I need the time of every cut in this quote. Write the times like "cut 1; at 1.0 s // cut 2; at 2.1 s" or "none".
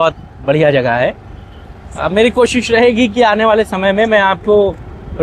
none